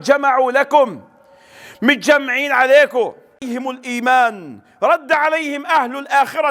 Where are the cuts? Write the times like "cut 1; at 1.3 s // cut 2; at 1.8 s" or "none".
cut 1; at 3.4 s